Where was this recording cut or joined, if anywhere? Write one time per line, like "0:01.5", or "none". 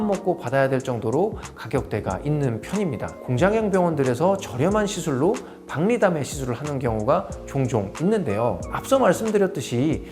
0:03.1